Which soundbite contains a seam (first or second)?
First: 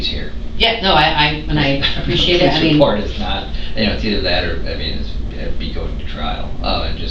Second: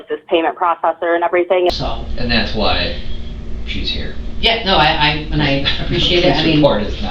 second